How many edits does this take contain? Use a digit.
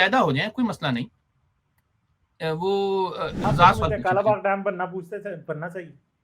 1